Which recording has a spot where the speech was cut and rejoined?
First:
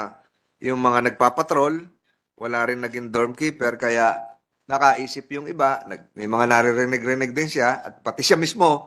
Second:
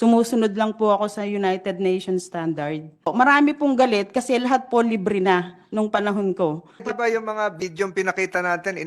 second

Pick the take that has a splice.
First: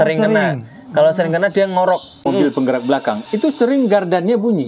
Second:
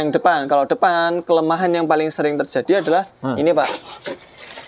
first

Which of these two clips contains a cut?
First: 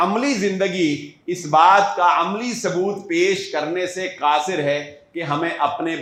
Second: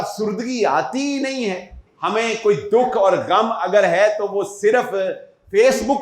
second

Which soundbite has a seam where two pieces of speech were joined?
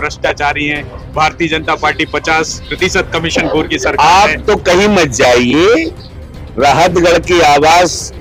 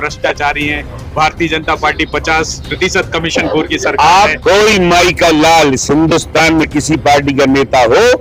second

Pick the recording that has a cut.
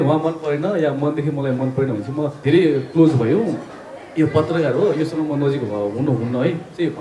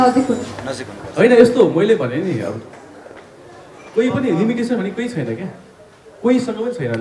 first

